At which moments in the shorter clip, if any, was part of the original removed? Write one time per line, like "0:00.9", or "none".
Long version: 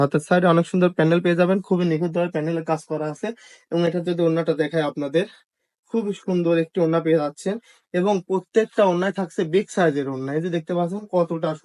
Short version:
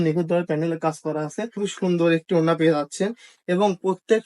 0:01.6